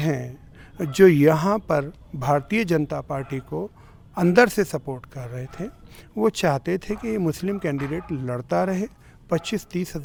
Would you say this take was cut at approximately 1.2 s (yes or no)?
no